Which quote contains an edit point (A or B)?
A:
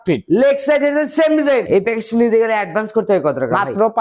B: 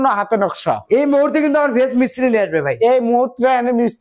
A